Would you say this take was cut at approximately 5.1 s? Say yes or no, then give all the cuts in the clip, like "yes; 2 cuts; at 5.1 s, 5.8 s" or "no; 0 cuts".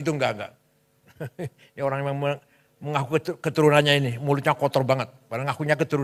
no; 0 cuts